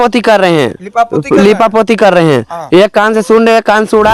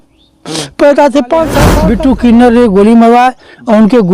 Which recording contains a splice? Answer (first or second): second